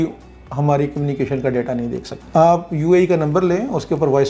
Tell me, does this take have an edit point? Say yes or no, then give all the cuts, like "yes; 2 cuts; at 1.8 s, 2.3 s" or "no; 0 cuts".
yes; 1 cut; at 2.1 s